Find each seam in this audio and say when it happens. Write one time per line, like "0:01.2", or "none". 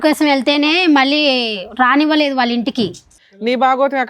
0:03.1